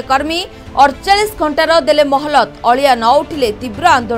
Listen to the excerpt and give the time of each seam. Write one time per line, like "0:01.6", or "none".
none